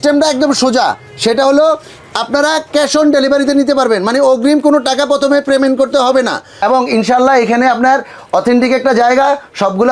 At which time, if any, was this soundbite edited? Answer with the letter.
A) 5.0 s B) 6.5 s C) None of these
B